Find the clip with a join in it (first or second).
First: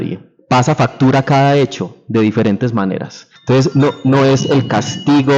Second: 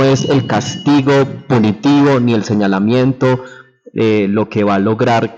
first